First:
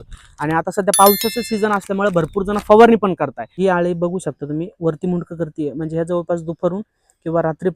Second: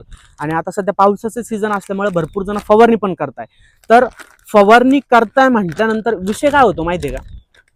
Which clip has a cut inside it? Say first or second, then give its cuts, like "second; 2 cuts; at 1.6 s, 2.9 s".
first; 1 cut; at 3.5 s